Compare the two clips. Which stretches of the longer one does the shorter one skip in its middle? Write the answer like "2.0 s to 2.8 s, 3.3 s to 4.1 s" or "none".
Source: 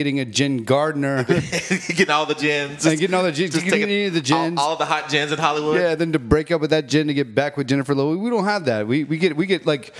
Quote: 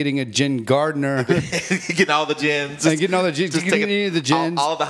none